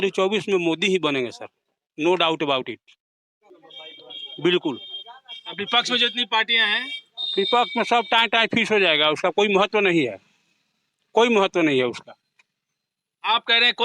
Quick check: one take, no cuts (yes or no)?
yes